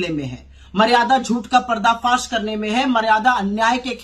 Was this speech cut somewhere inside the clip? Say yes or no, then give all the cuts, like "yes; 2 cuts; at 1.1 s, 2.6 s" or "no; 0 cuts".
no; 0 cuts